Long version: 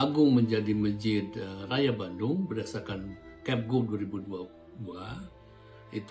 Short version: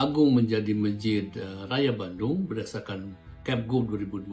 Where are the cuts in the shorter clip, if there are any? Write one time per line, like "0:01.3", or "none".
none